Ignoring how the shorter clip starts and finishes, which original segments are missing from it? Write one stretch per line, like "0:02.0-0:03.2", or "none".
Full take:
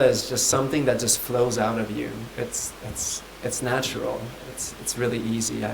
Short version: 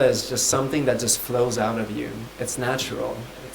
0:02.2-0:03.3